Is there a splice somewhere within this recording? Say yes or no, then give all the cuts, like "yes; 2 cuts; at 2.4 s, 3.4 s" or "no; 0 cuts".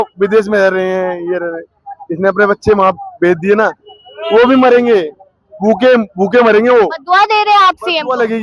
no; 0 cuts